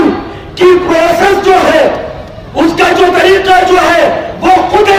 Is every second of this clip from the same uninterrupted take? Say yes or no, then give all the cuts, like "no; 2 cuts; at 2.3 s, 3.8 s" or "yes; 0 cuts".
yes; 0 cuts